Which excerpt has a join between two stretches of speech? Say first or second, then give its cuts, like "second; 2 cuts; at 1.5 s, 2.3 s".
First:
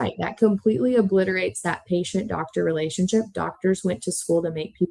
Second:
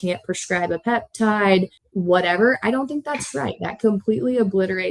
second; 1 cut; at 1.8 s